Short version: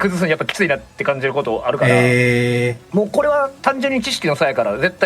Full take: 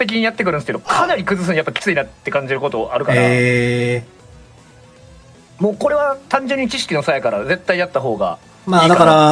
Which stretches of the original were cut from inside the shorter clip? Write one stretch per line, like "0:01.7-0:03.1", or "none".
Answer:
0:04.1-0:05.5